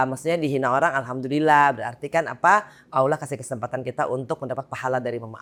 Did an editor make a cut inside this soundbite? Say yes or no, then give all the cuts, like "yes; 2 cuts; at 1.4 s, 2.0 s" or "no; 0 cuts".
no; 0 cuts